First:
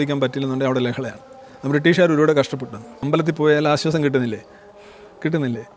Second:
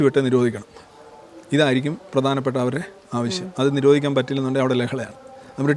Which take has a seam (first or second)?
first